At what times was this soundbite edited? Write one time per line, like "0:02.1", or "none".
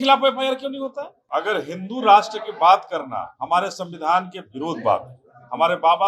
0:01.2